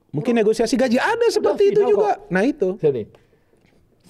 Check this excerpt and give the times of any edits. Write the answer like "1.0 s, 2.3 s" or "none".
none